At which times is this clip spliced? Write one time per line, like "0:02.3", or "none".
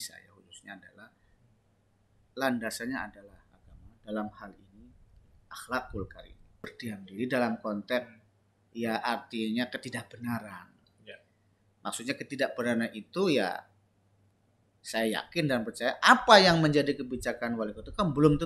0:06.6